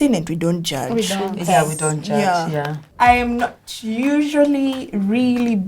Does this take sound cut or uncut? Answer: cut